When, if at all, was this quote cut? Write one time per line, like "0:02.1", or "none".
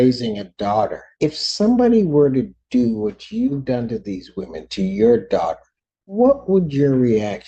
0:01.0